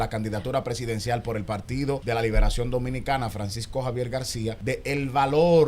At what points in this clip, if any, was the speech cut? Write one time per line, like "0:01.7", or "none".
0:02.0
0:04.6